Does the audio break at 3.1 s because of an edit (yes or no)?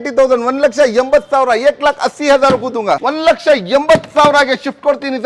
yes